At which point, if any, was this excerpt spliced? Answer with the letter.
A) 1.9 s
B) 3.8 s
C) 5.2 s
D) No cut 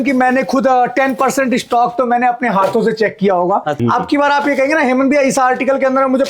B